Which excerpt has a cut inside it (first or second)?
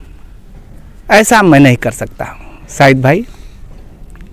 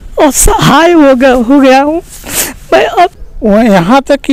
second